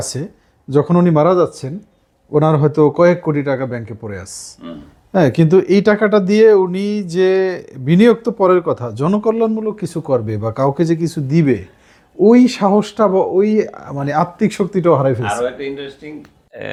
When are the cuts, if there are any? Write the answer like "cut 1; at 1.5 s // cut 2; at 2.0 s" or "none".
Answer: none